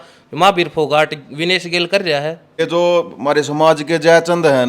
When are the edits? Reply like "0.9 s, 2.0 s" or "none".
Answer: 2.6 s